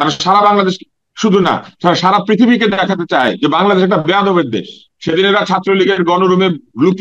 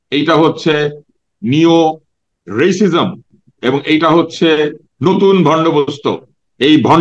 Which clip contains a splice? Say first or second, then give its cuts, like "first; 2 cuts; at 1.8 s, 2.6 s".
first; 1 cut; at 4.9 s